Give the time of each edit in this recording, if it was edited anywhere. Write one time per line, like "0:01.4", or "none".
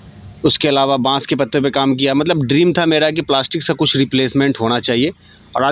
none

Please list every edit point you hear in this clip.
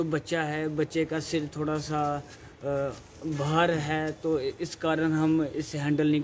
none

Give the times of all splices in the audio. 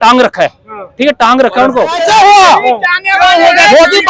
0:02.0

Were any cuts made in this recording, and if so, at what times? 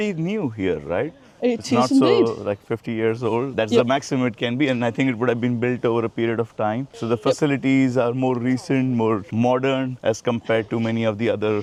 none

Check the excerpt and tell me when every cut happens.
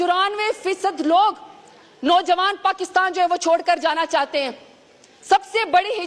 none

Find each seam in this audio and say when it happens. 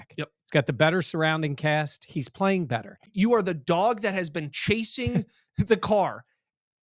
0:03.1

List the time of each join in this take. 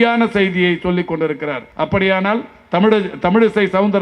0:01.6

